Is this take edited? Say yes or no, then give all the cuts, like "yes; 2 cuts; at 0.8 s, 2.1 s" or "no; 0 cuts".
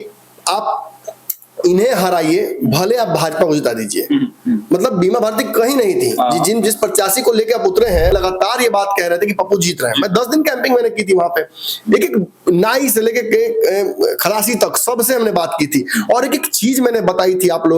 yes; 1 cut; at 8.1 s